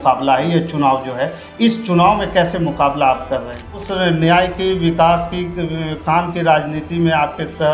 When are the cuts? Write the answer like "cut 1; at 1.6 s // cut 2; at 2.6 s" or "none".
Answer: cut 1; at 3.9 s